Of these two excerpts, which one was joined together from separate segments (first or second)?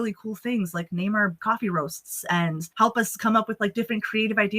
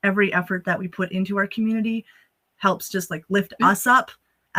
first